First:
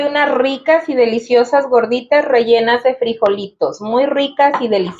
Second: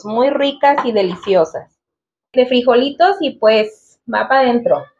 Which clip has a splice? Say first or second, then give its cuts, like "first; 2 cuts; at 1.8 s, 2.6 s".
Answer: second; 1 cut; at 2.3 s